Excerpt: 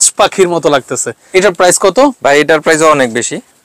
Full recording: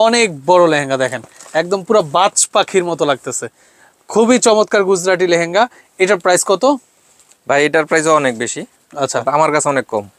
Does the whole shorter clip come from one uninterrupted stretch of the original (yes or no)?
no